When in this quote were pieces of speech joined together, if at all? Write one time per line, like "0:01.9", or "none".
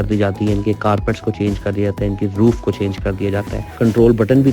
0:03.6